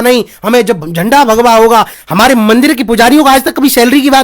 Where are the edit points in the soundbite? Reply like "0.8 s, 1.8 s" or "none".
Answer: 2.0 s